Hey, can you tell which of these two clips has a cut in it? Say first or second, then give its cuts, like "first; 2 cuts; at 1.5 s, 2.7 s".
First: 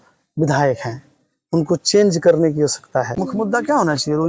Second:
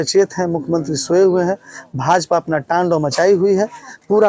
first; 1 cut; at 3.2 s